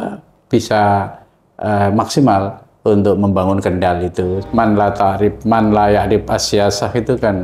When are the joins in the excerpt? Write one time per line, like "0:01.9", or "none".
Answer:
0:04.4